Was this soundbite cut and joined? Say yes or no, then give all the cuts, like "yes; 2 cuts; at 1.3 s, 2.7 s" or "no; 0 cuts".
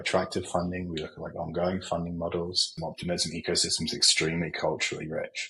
yes; 1 cut; at 2.7 s